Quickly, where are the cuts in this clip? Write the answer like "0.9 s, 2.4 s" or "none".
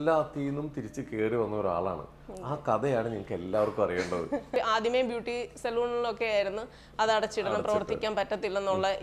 4.5 s